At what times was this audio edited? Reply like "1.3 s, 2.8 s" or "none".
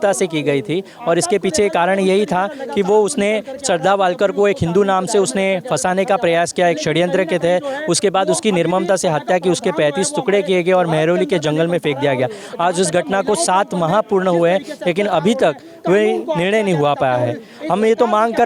none